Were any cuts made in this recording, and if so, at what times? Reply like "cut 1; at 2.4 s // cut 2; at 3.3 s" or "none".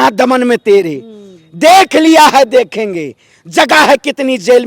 none

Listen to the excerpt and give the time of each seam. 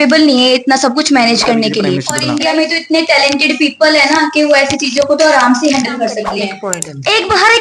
cut 1; at 2.1 s // cut 2; at 6.5 s

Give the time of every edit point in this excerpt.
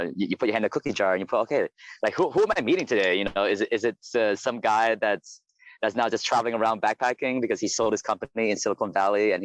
cut 1; at 4.0 s

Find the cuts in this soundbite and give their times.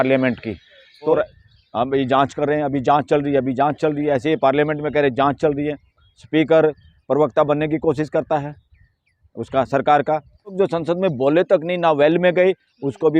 cut 1; at 1.2 s // cut 2; at 10.5 s

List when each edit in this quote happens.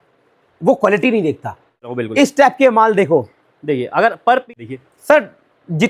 cut 1; at 2.0 s // cut 2; at 4.5 s

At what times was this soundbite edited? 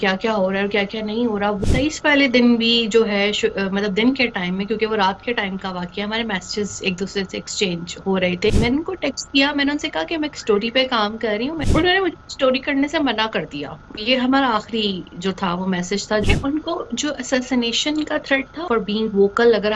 cut 1; at 1.6 s // cut 2; at 8.5 s // cut 3; at 11.6 s // cut 4; at 16.2 s // cut 5; at 18.6 s

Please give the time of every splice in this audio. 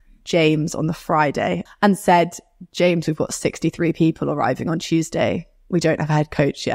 cut 1; at 1.6 s

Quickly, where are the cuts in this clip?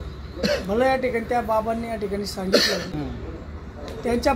cut 1; at 2.9 s

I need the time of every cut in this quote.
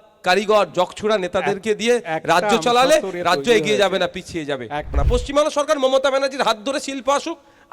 cut 1; at 5.0 s

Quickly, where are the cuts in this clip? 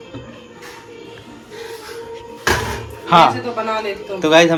none

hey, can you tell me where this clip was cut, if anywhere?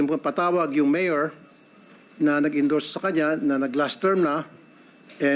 none

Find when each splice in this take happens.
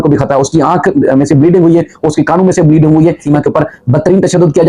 cut 1; at 3.2 s

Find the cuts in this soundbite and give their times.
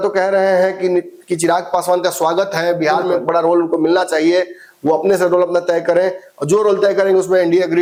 none

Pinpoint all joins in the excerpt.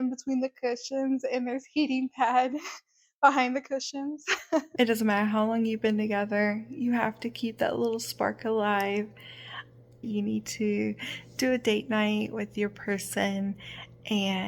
cut 1; at 4.7 s // cut 2; at 10.1 s

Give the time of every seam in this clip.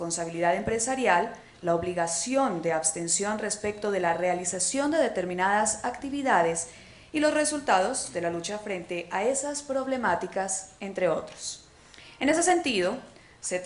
cut 1; at 1.5 s

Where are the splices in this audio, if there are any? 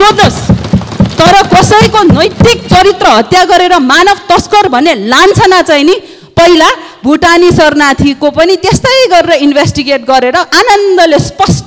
none

